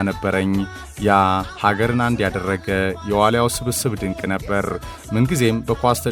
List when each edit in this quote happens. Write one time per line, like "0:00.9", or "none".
none